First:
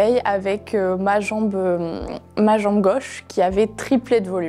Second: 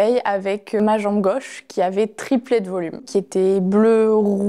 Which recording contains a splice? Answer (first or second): second